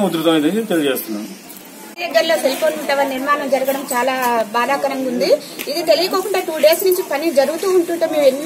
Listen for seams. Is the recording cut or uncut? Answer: cut